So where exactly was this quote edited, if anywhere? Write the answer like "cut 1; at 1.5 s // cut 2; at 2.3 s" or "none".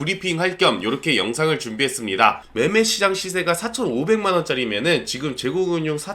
cut 1; at 2.4 s